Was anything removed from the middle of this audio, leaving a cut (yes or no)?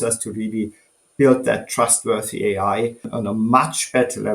yes